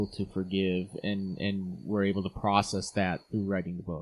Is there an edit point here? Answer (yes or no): no